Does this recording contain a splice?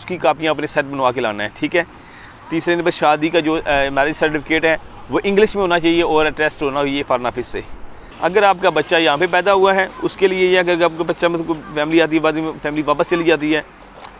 yes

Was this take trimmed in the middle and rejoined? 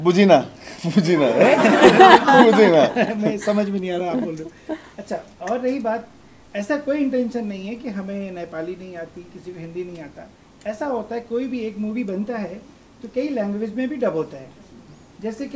no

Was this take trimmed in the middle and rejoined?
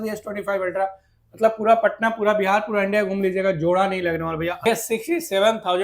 yes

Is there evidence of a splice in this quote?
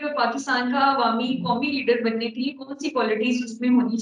no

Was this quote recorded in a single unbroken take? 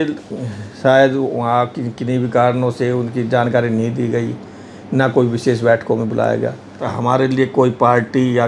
no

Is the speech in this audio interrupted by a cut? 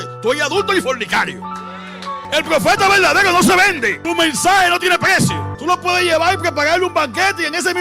yes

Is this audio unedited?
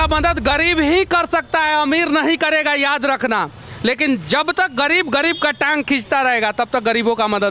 yes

